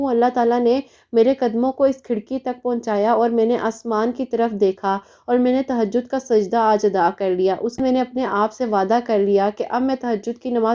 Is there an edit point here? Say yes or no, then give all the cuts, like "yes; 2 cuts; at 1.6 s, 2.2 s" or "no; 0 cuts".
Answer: no; 0 cuts